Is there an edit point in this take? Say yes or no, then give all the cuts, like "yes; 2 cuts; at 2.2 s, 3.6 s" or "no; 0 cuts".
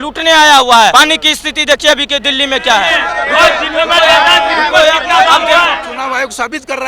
yes; 3 cuts; at 0.9 s, 3.0 s, 5.9 s